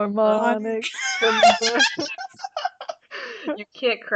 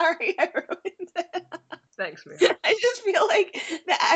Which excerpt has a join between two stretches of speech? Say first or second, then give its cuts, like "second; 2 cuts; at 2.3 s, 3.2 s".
second; 1 cut; at 1.8 s